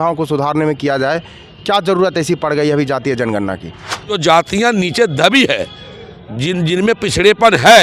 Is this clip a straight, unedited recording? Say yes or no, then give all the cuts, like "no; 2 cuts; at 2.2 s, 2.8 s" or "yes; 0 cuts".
no; 1 cut; at 4.1 s